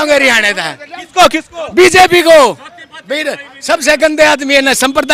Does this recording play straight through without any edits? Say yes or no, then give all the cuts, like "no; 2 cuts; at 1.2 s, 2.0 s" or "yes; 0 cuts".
yes; 0 cuts